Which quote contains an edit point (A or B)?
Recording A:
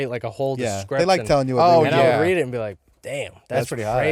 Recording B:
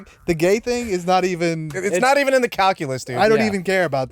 B